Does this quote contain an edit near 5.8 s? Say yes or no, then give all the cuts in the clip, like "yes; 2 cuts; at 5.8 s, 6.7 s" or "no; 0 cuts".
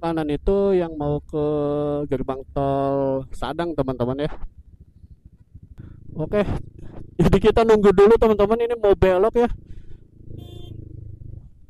yes; 1 cut; at 5.8 s